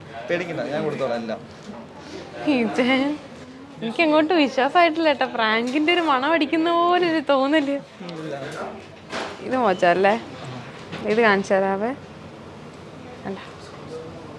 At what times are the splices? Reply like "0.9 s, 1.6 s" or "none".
none

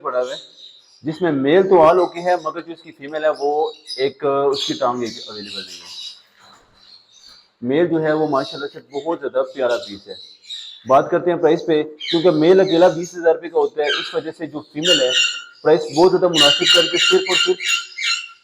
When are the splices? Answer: none

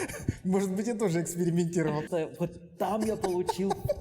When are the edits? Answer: 2.0 s

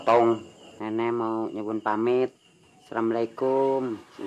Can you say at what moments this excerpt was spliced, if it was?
none

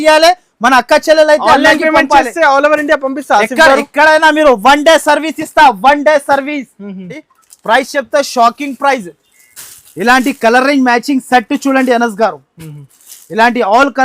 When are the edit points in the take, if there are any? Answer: 7.2 s

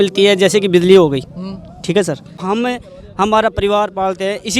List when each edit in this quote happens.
2.4 s

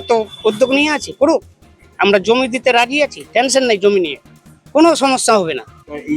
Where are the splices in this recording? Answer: none

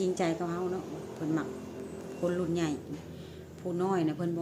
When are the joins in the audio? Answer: none

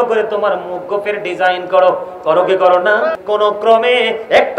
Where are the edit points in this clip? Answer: 3.6 s

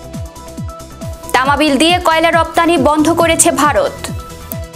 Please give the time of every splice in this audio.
1.3 s, 4.0 s

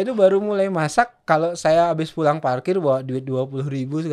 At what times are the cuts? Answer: none

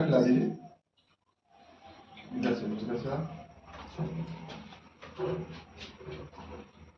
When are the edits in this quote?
none

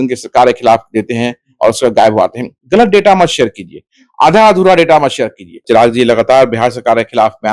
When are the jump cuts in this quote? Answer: 5.6 s

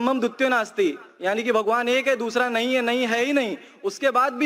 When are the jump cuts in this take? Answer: none

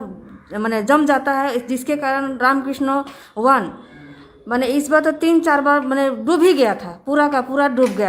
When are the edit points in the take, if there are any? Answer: none

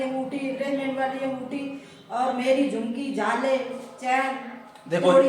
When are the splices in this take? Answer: none

